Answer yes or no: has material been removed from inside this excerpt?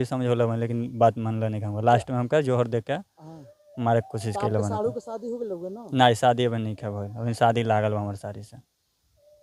no